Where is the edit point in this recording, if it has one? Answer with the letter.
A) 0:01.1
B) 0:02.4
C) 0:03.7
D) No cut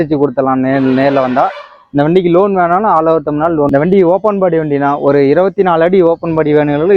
C